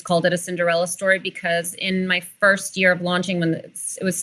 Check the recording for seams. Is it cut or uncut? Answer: cut